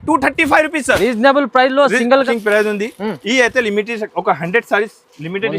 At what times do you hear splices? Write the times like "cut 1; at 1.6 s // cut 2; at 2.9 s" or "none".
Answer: cut 1; at 2.1 s